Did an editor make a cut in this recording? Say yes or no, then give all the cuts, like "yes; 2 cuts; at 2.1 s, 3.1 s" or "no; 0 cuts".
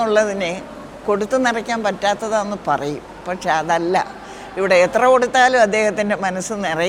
no; 0 cuts